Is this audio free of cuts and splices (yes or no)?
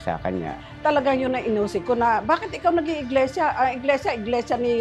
yes